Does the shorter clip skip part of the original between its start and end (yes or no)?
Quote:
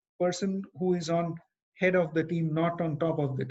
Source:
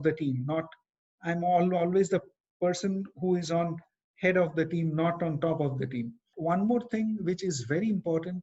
no